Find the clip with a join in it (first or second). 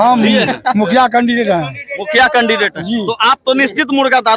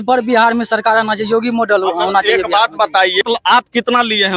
second